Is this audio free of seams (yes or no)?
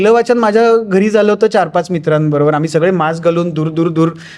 yes